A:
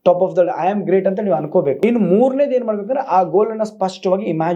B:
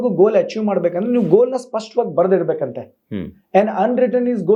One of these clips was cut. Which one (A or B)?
A